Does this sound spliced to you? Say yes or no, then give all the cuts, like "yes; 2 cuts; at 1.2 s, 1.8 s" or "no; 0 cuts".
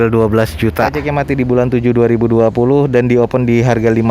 yes; 1 cut; at 1.0 s